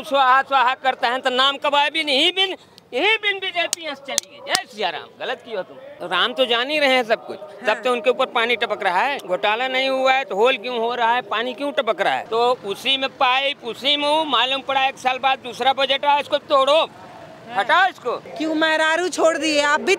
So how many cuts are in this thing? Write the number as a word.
four